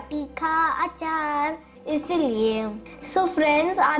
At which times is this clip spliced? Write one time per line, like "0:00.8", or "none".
0:01.7